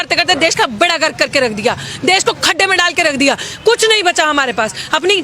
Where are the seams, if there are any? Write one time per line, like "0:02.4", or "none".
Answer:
none

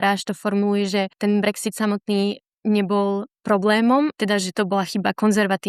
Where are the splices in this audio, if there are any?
0:01.1
0:04.1

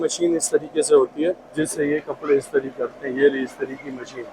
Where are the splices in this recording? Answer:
0:01.4

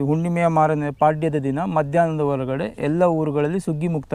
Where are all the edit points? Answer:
none

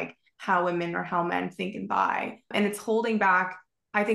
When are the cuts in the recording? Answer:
0:02.5

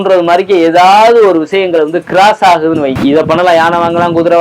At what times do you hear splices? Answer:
0:02.9

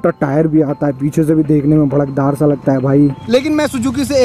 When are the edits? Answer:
0:03.2

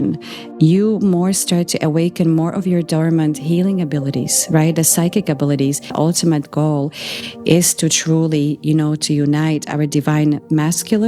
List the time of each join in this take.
0:05.9

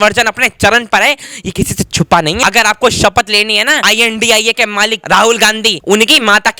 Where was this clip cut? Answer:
0:02.4
0:03.8
0:05.0
0:05.8

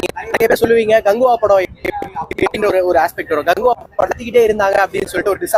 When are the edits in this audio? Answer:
none

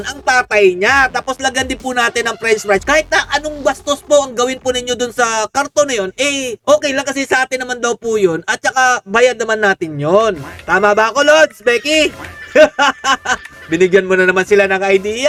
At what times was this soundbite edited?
none

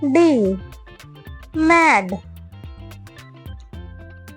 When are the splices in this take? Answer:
0:02.2

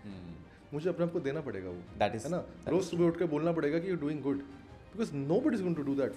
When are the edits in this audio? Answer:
none

